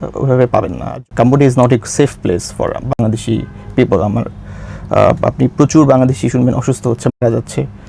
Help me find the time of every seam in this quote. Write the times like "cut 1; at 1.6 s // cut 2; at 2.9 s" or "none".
cut 1; at 1.0 s